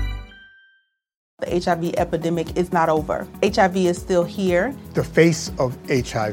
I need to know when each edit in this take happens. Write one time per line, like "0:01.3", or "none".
0:01.3